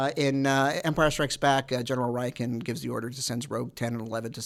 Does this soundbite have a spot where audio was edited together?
no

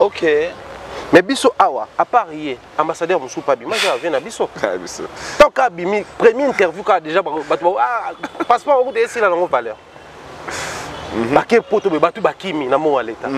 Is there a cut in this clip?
no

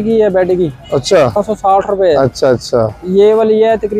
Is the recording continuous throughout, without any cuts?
no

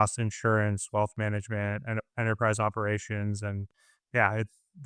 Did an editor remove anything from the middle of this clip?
no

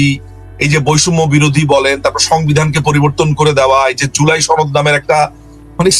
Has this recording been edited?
no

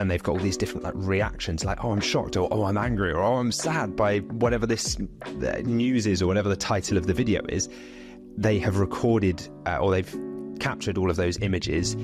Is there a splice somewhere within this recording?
no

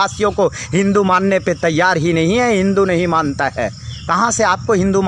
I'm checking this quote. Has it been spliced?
no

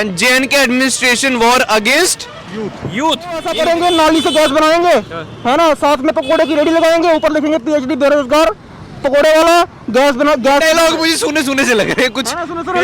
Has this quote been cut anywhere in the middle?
yes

